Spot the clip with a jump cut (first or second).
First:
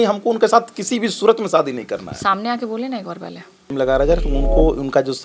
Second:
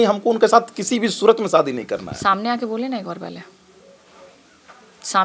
first